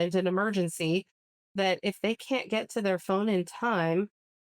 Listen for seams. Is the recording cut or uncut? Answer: uncut